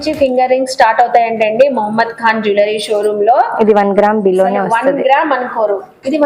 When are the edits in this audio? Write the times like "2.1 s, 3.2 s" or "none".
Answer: none